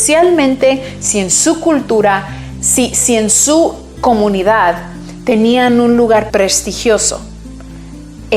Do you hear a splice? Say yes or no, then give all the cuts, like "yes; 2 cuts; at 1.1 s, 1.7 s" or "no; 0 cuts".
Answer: yes; 1 cut; at 6.3 s